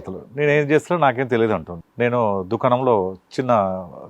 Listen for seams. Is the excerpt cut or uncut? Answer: cut